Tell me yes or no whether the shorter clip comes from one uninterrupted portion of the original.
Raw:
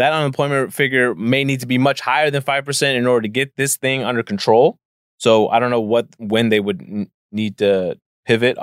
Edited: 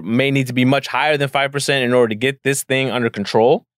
yes